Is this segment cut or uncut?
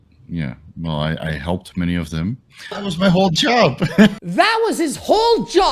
cut